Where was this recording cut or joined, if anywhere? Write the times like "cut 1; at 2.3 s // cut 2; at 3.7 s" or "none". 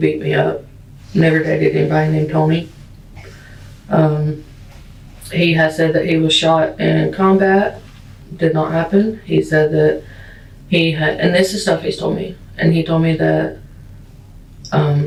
none